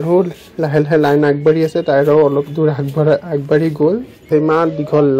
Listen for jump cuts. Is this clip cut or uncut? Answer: cut